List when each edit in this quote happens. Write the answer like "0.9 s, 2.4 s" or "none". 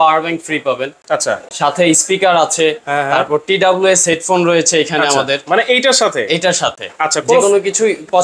none